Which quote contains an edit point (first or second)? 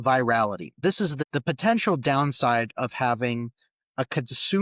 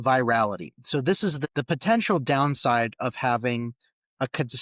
first